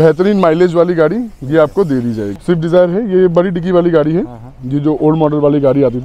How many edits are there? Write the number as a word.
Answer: one